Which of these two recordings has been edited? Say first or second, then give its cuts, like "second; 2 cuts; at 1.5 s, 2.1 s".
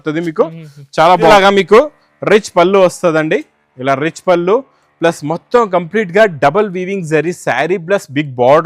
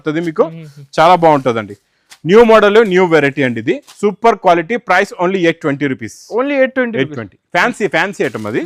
first; 1 cut; at 1.3 s